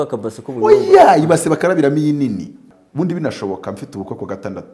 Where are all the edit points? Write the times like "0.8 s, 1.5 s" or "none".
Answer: 2.7 s

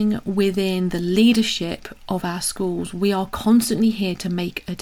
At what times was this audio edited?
none

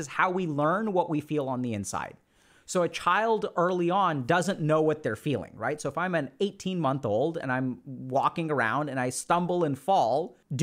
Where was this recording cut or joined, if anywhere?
none

